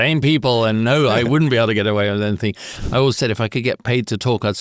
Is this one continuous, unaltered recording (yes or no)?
no